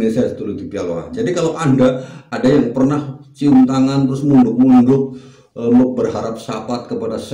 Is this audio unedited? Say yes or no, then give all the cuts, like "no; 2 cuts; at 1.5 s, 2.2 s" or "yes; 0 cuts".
yes; 0 cuts